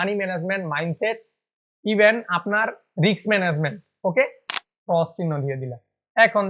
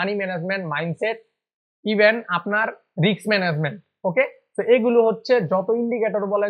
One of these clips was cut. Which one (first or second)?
first